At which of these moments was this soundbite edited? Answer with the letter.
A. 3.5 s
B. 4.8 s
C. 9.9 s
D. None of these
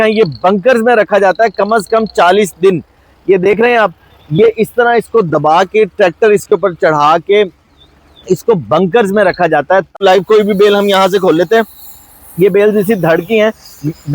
C